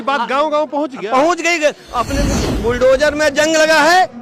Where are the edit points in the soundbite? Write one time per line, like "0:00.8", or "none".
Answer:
0:02.3